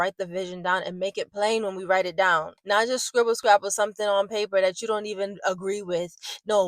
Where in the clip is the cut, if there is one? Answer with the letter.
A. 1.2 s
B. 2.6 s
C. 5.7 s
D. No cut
B